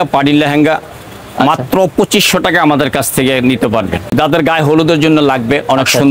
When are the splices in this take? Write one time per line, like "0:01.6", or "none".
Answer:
0:04.1